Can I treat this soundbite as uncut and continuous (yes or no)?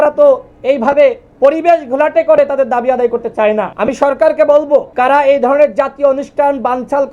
no